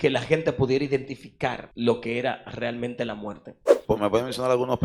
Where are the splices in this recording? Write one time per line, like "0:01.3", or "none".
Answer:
0:01.7
0:03.7